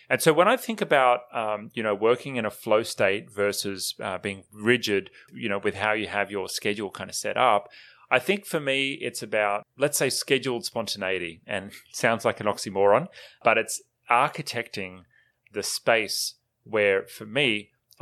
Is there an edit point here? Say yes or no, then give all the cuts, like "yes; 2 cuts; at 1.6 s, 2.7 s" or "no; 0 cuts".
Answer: yes; 2 cuts; at 5.3 s, 9.7 s